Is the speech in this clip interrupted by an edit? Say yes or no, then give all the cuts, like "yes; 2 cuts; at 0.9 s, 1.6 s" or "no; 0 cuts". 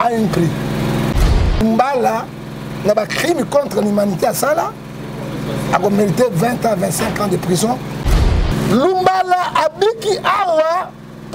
yes; 2 cuts; at 1.2 s, 8.0 s